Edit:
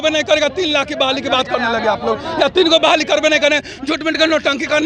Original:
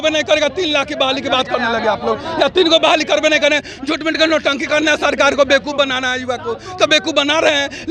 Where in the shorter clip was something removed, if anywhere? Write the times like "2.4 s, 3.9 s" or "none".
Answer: none